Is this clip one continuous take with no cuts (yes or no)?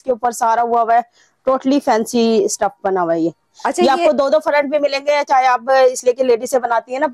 yes